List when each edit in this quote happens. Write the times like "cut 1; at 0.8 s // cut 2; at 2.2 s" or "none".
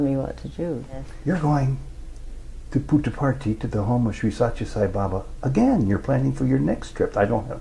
cut 1; at 1.1 s